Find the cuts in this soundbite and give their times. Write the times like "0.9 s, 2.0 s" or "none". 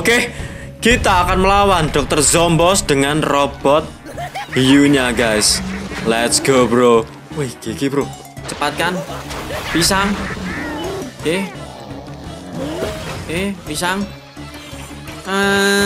none